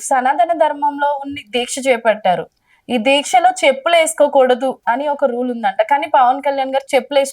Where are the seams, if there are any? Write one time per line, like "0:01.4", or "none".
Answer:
0:04.8